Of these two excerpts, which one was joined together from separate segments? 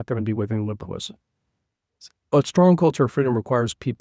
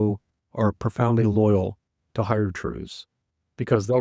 first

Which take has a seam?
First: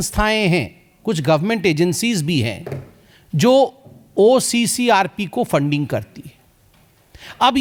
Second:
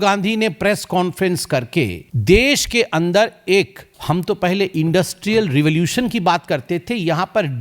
second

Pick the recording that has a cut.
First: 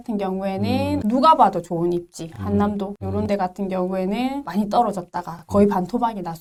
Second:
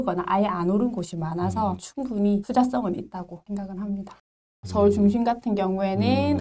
second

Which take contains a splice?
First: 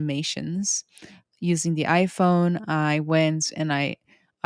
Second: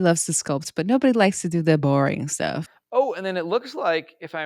second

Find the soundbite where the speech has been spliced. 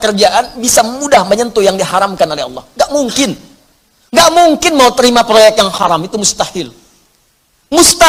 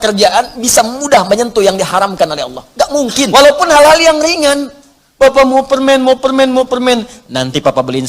second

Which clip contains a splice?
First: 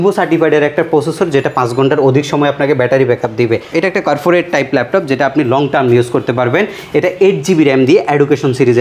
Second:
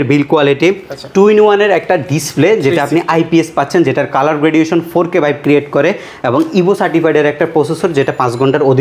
first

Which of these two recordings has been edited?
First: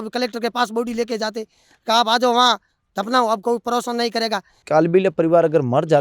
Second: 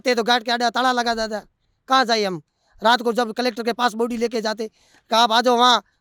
first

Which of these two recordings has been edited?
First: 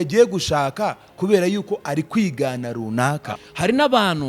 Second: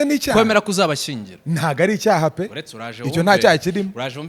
first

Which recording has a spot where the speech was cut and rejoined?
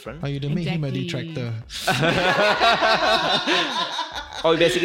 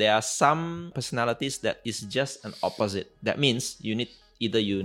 second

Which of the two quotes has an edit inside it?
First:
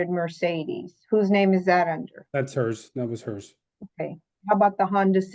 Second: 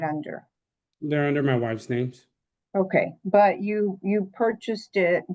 first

